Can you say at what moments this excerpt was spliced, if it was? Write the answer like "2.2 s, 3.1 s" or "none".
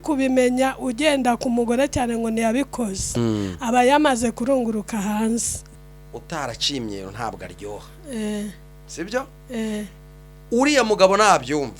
5.8 s